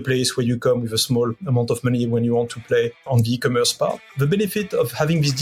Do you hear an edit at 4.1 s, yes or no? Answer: yes